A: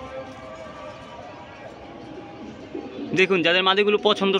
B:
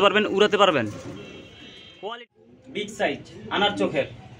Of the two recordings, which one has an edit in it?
B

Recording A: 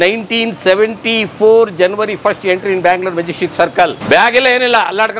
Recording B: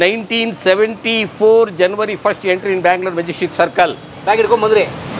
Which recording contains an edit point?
A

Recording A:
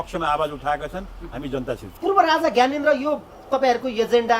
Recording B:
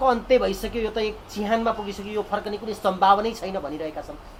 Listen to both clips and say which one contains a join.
A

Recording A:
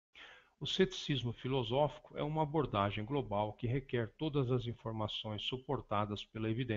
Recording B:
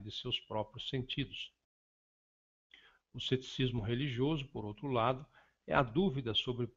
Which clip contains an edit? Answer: A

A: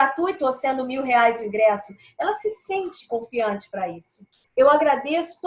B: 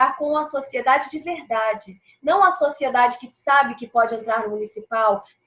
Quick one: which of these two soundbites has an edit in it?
A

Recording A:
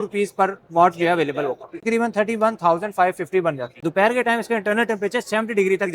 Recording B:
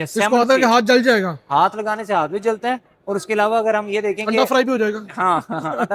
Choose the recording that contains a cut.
A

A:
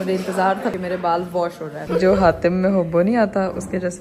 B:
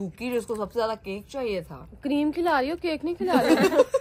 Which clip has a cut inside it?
A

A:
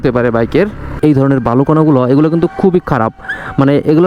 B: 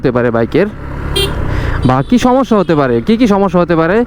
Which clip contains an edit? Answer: A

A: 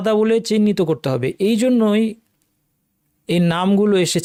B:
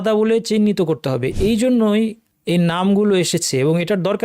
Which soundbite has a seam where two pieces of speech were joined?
B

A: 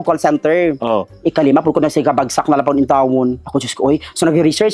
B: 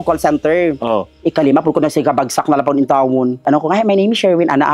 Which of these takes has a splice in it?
B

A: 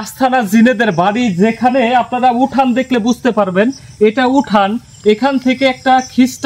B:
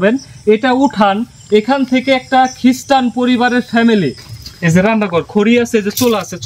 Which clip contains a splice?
B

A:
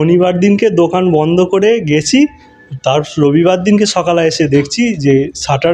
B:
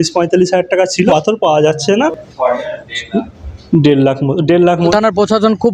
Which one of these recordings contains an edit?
B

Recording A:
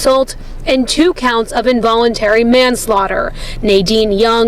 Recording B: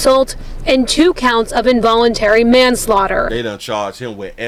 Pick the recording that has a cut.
A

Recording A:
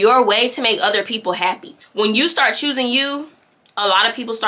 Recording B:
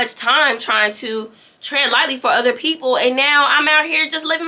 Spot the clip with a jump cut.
A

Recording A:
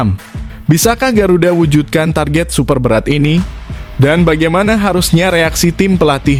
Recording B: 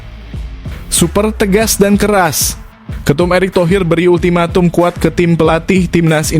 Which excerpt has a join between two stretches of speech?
B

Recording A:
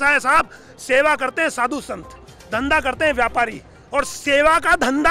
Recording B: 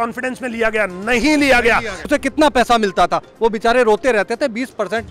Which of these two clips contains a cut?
B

